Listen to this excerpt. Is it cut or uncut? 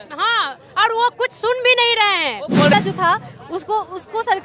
cut